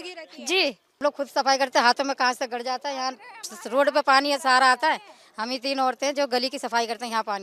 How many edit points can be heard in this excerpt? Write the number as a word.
one